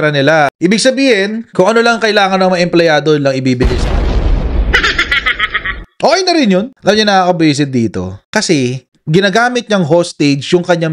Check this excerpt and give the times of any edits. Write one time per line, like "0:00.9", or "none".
none